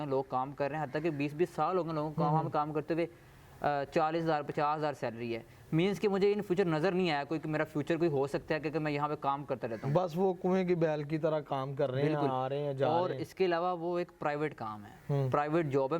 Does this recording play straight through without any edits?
yes; 0 cuts

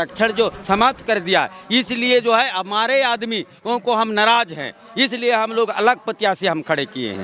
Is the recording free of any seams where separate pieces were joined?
yes; 0 cuts

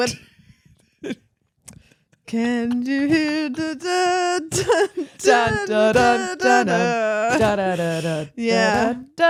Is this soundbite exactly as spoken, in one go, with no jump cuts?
yes; 0 cuts

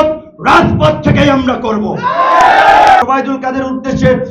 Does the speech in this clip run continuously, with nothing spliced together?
no; 1 cut; at 3.0 s

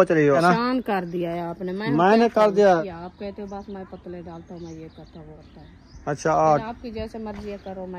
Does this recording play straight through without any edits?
no; 3 cuts; at 0.7 s, 2.8 s, 5.4 s

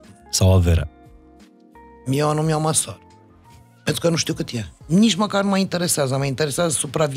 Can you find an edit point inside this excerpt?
yes; 1 cut; at 4.7 s

